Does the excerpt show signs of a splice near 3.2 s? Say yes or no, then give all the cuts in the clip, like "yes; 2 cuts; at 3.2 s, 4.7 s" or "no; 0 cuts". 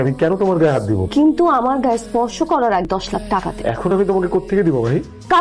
yes; 2 cuts; at 1.0 s, 3.2 s